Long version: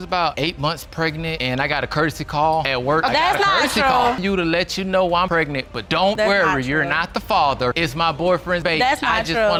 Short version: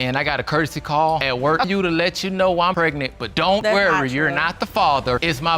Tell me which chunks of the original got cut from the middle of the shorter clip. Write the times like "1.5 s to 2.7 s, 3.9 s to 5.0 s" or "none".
3.1 s to 4.2 s